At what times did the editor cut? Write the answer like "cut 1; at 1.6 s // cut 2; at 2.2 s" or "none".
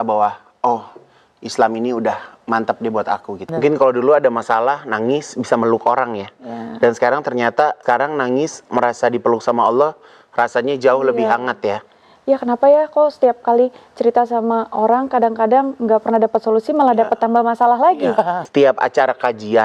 cut 1; at 3.4 s // cut 2; at 7.8 s // cut 3; at 18.4 s